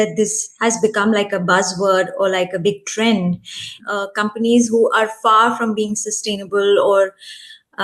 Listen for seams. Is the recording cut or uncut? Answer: cut